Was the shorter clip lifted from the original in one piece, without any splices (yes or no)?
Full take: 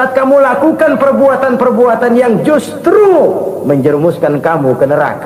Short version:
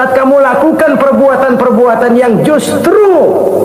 yes